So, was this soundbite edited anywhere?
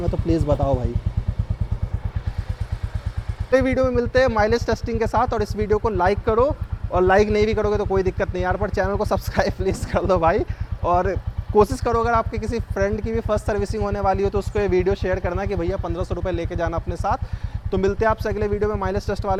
no; 0 cuts

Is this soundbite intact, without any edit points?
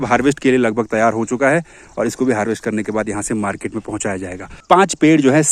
no; 1 cut; at 4.6 s

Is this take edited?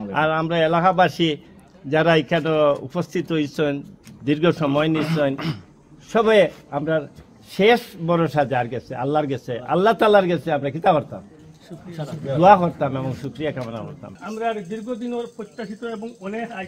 yes; 1 cut; at 14.1 s

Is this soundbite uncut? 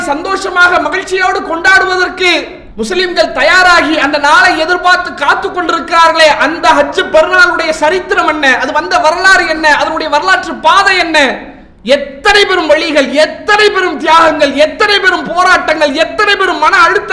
yes; 0 cuts

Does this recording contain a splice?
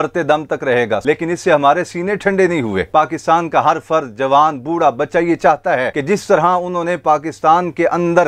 yes; 2 cuts; at 1.0 s, 5.9 s

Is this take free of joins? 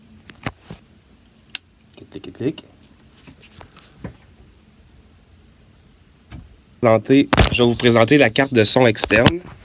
no; 2 cuts; at 0.8 s, 6.8 s

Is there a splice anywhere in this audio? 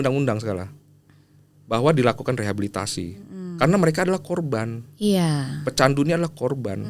no; 0 cuts

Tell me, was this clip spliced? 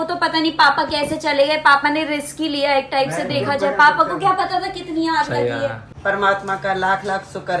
yes; 1 cut; at 5.9 s

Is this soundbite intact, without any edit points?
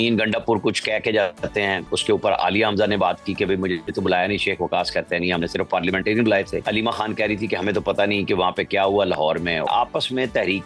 no; 4 cuts; at 1.9 s, 3.9 s, 6.6 s, 9.7 s

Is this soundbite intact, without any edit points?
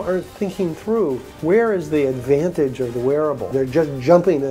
no; 2 cuts; at 1.3 s, 3.4 s

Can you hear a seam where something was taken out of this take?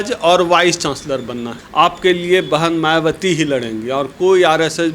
yes; 1 cut; at 1.6 s

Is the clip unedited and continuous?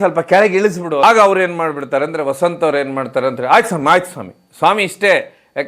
yes; 0 cuts

